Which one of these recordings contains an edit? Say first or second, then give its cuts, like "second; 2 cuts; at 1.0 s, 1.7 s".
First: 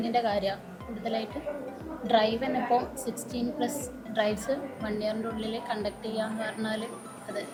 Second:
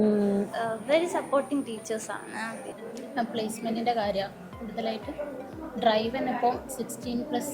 second; 1 cut; at 2.6 s